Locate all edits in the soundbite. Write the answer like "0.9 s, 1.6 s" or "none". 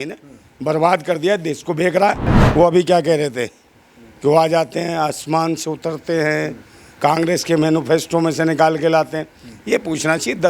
2.3 s